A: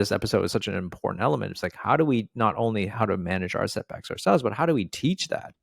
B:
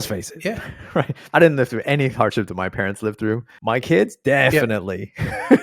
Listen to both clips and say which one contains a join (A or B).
B